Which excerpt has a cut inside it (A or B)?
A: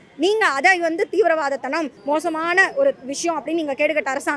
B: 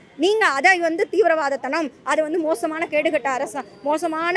A